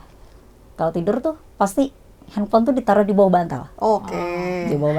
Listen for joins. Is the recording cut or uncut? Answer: uncut